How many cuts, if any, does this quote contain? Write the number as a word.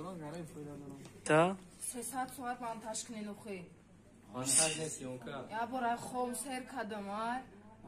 one